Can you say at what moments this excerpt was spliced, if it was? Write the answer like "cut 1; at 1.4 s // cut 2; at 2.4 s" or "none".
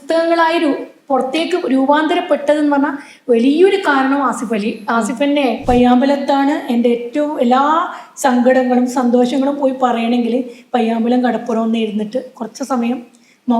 cut 1; at 5.6 s